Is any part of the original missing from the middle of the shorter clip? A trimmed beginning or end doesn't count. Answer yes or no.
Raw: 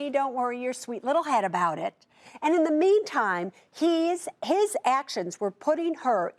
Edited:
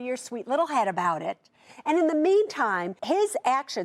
yes